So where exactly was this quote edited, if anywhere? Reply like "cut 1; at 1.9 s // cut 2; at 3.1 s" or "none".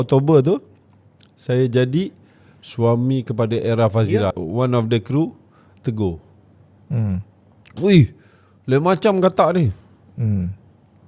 cut 1; at 4.3 s